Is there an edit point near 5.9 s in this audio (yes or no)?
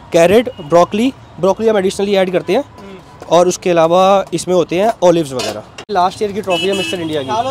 yes